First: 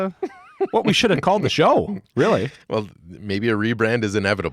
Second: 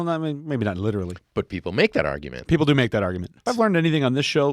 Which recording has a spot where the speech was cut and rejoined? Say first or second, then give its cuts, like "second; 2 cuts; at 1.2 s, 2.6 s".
second; 2 cuts; at 1.2 s, 3.3 s